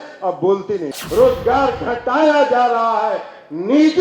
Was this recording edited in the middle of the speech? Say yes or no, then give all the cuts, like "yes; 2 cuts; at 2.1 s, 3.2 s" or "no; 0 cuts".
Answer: yes; 1 cut; at 1.0 s